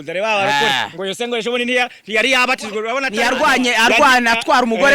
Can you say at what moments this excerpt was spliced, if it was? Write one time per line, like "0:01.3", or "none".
0:03.5